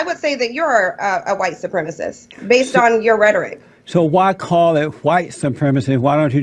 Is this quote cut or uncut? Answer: uncut